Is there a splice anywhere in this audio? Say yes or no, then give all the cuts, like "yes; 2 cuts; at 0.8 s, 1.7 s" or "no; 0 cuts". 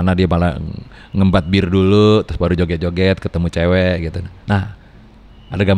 no; 0 cuts